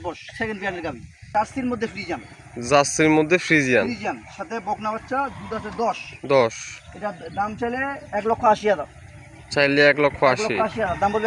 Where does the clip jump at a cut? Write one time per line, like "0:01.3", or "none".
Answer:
0:01.3